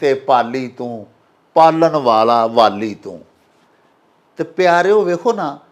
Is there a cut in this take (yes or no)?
no